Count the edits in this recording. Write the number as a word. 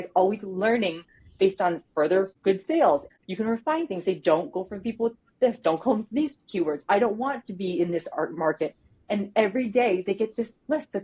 two